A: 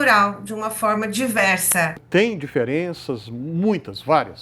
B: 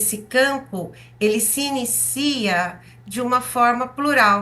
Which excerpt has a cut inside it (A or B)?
A